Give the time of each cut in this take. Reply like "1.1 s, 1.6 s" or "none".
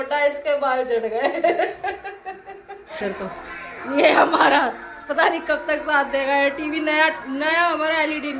3.0 s